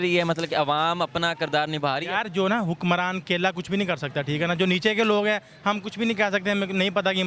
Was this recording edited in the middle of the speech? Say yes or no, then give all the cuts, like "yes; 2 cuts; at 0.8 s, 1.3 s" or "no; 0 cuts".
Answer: no; 0 cuts